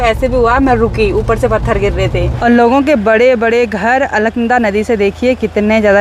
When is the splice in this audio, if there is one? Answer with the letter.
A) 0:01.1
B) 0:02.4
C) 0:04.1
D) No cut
B